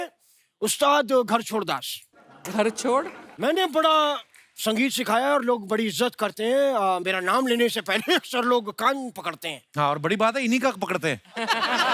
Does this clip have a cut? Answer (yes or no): no